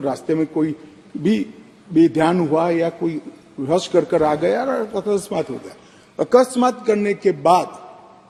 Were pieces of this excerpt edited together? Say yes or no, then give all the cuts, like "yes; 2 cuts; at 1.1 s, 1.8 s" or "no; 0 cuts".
no; 0 cuts